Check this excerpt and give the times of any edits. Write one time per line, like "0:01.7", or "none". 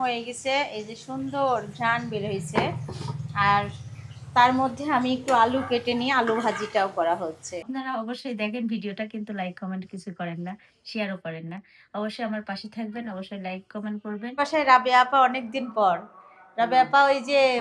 0:07.6
0:14.4